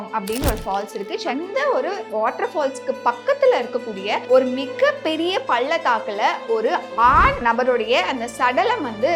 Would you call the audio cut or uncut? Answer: cut